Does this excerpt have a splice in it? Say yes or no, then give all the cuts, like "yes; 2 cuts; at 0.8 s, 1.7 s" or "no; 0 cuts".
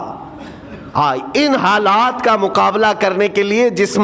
no; 0 cuts